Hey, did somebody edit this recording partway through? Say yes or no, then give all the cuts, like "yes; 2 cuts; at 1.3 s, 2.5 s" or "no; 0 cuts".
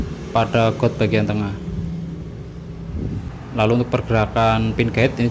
yes; 1 cut; at 3.3 s